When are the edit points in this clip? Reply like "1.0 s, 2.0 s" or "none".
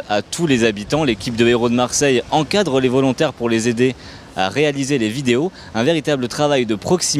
2.1 s

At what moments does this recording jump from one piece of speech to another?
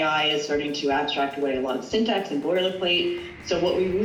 none

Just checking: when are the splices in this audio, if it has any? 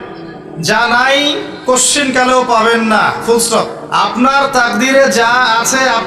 3.8 s

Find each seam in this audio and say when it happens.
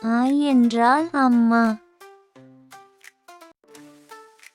1.8 s, 3.5 s

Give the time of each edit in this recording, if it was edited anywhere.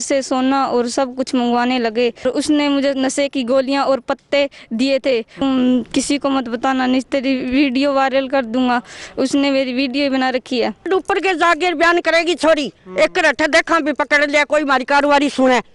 2.2 s, 5.4 s, 10.8 s

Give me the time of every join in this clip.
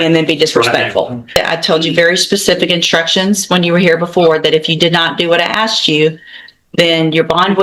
1.4 s

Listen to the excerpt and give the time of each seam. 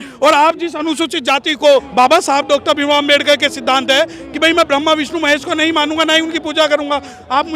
1.9 s

